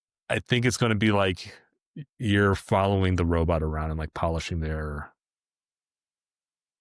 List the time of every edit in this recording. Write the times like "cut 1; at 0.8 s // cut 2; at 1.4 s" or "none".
none